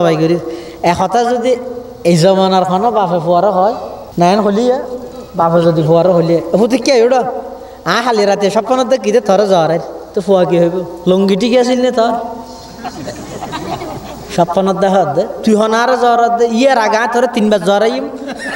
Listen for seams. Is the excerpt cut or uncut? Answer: cut